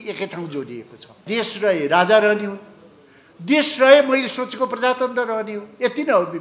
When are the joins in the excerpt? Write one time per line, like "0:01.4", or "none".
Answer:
0:01.2